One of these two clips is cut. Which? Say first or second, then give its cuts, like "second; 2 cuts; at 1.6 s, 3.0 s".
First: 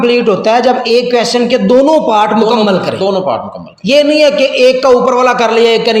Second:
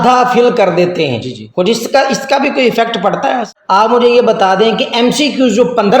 second; 1 cut; at 3.5 s